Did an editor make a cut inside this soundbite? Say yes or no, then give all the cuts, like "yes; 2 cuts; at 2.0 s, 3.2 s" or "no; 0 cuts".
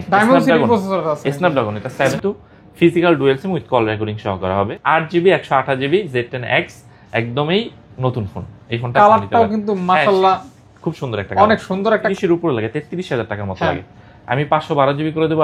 yes; 3 cuts; at 2.1 s, 4.8 s, 12.1 s